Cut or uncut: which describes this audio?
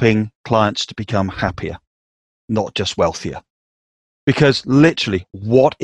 uncut